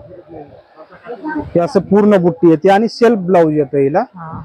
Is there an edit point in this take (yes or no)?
no